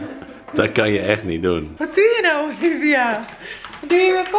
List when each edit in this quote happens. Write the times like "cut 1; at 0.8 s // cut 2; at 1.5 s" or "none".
cut 1; at 1.8 s